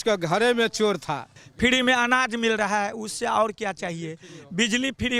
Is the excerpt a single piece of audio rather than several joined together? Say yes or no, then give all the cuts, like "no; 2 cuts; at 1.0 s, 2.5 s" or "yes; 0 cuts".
no; 1 cut; at 1.4 s